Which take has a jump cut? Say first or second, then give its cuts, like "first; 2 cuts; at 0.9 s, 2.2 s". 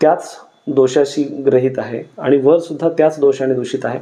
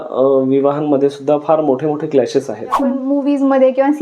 second; 1 cut; at 3.0 s